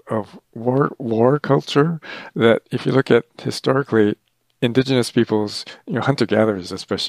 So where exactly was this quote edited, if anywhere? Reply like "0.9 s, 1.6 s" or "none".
4.2 s